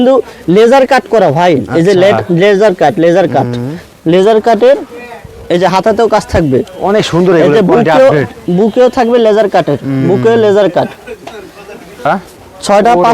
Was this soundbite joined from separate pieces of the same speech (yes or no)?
yes